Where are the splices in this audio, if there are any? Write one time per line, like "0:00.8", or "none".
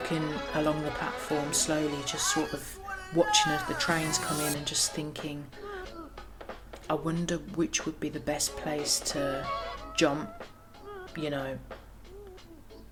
none